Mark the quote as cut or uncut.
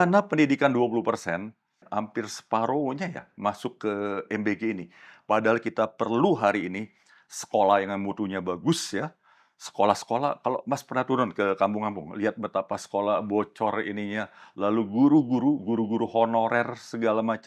cut